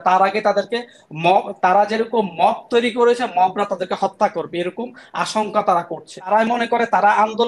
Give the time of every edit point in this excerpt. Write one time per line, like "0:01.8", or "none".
0:06.3